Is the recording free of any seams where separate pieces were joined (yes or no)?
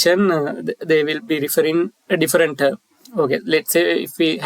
yes